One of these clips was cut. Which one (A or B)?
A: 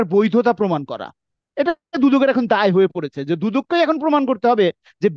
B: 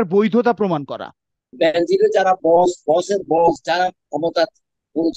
B